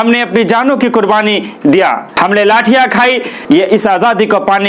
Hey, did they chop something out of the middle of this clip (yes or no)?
yes